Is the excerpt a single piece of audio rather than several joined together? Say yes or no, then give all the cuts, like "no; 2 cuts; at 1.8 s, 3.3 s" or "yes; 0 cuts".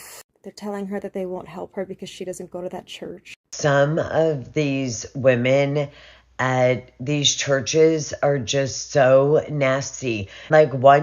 no; 1 cut; at 3.5 s